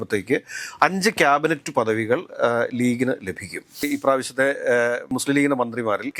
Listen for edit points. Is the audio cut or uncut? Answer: cut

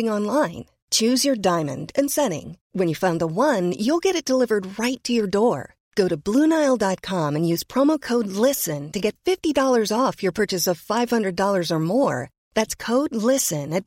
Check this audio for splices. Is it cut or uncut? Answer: uncut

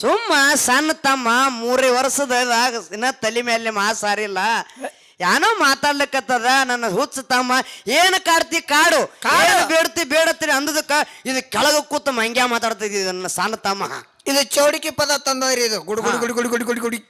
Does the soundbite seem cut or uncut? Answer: uncut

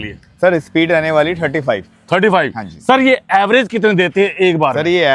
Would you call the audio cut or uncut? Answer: uncut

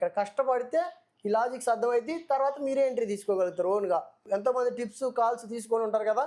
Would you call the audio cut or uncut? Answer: cut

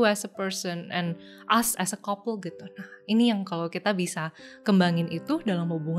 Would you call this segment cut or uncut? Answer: uncut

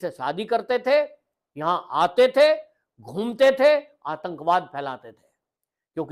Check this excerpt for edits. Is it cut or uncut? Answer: uncut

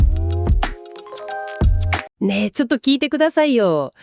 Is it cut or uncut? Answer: cut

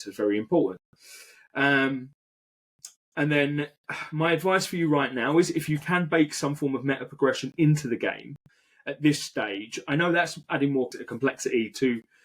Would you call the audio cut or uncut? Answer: cut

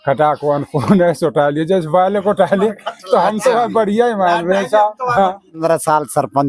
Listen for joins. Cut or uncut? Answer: cut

